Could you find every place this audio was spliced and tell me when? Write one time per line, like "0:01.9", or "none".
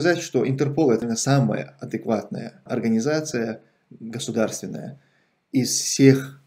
0:01.0
0:02.6